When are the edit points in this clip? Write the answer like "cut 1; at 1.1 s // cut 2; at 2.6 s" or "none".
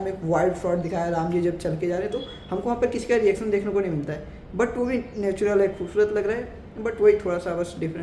none